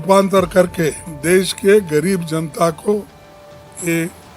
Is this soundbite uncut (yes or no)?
no